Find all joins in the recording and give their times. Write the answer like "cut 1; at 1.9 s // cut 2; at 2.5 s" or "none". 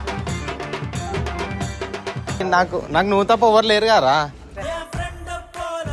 cut 1; at 2.4 s // cut 2; at 4.4 s